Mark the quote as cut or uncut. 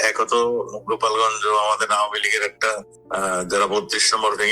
cut